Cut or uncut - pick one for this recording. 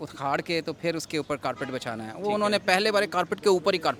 uncut